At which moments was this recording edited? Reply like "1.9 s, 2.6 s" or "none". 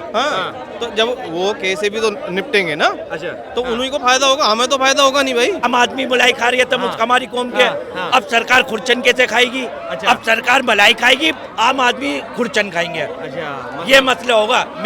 5.6 s